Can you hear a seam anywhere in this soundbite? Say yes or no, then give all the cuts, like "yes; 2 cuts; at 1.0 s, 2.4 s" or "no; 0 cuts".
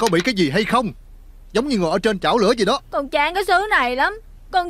yes; 1 cut; at 2.9 s